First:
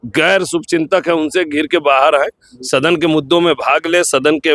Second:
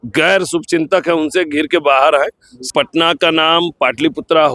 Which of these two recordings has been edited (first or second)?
second